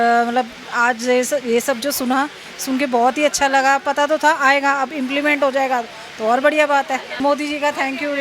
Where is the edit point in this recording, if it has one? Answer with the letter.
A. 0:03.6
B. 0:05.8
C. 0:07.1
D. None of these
C